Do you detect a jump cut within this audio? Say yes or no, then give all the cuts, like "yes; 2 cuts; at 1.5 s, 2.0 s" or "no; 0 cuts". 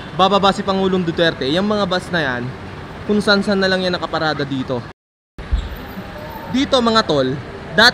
yes; 1 cut; at 5.0 s